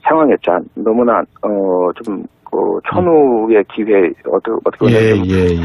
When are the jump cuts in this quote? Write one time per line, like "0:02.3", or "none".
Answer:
0:01.4